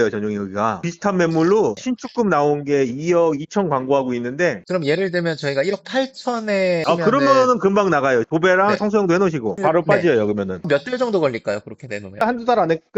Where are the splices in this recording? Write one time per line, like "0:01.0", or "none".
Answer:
0:00.8
0:04.6
0:10.6
0:12.2